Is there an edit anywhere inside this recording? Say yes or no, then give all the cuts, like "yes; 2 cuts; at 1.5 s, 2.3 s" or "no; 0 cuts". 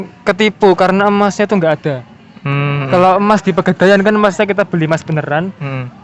no; 0 cuts